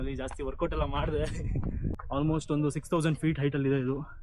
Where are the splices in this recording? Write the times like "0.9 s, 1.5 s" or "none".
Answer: 1.9 s